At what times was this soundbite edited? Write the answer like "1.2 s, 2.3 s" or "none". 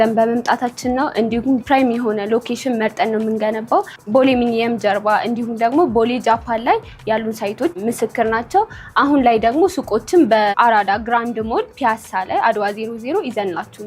none